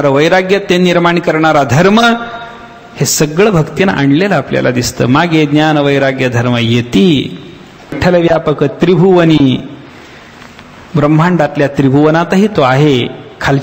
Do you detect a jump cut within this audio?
yes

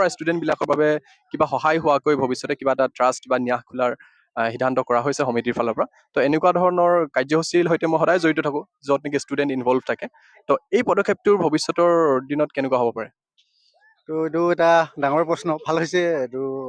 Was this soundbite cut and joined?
no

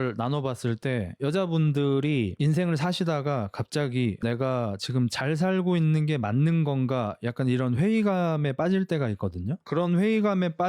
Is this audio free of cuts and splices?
no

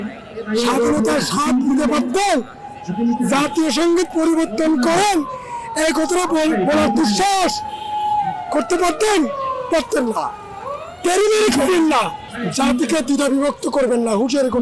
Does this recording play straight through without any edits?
yes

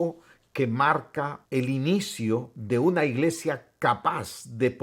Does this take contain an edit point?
yes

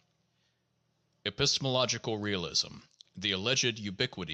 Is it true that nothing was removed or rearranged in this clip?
yes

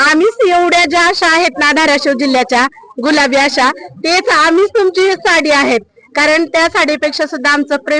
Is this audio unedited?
yes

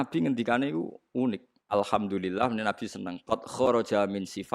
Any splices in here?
yes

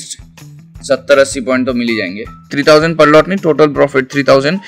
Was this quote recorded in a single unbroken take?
no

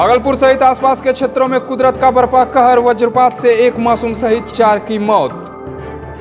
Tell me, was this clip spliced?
no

